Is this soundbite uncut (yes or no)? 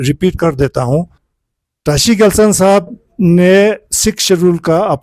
no